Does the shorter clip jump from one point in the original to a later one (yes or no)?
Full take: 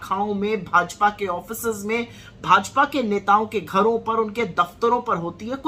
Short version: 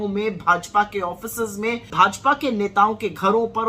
yes